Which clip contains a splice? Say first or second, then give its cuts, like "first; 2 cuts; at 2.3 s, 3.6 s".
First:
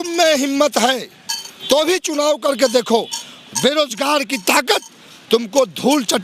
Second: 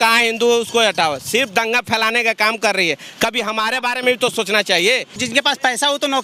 second; 1 cut; at 5.2 s